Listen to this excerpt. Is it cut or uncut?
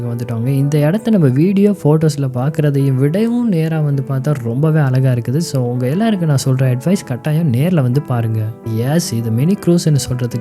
cut